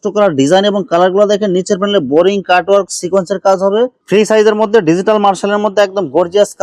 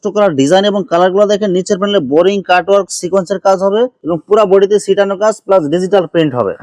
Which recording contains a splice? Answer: first; 1 cut; at 4.0 s

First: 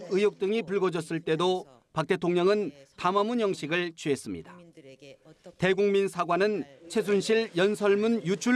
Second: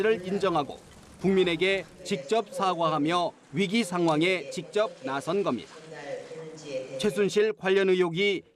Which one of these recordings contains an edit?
second; 1 cut; at 1.9 s

